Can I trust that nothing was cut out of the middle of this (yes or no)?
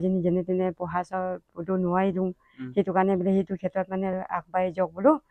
yes